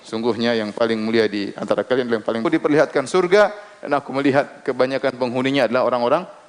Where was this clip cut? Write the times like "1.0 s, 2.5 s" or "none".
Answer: 2.4 s

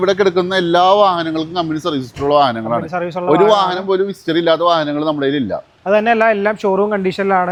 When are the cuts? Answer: none

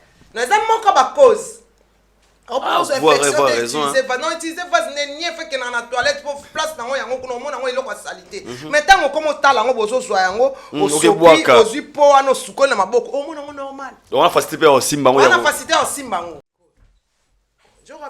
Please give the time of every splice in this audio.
16.5 s

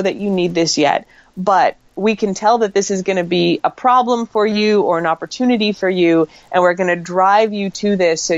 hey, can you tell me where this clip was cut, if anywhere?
none

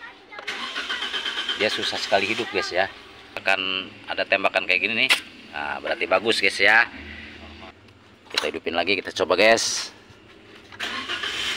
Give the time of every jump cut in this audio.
3.4 s, 7.6 s

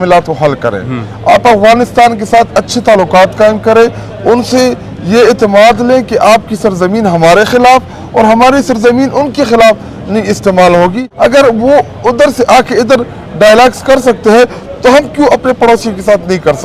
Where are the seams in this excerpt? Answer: 11.0 s

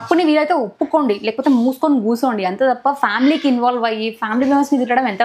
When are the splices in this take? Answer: none

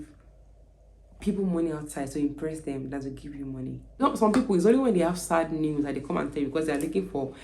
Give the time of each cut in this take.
3.9 s

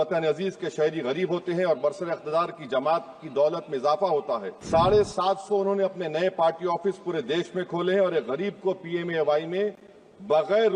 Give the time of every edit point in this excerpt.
4.5 s

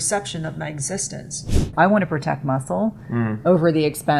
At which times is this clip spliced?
1.7 s

